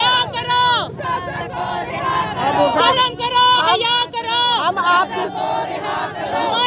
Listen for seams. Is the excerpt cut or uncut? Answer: uncut